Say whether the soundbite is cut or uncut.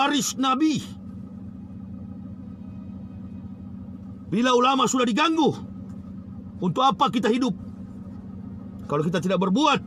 uncut